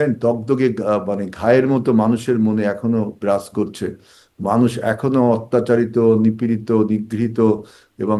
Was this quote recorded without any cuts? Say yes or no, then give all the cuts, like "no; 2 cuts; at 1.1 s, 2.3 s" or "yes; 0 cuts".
yes; 0 cuts